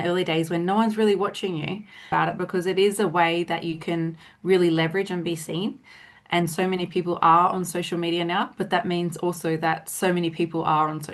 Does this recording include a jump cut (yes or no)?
yes